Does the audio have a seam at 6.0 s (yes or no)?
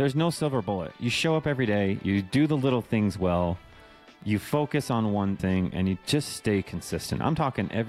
no